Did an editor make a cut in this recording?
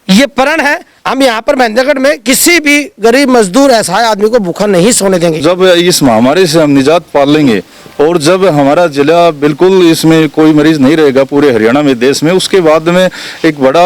yes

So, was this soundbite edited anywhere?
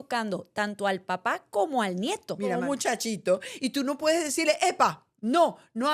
yes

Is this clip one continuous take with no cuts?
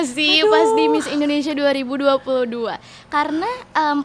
yes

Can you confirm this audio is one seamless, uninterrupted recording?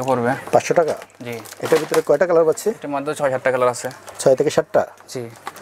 yes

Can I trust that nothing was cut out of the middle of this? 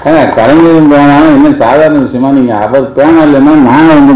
yes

